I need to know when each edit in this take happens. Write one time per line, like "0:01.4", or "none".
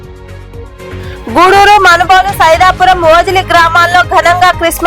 0:01.2